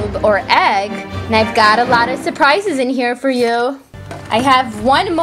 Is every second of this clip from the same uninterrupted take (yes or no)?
no